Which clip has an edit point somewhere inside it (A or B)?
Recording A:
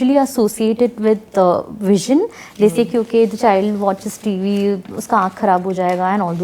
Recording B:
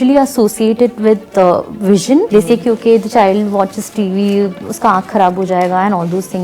B